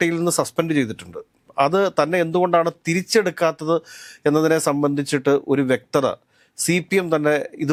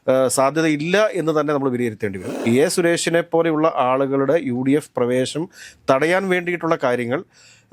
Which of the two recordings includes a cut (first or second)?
second